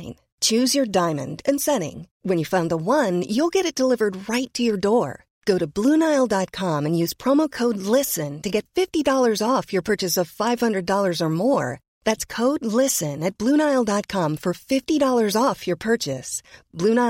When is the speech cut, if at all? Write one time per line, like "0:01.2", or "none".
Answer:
none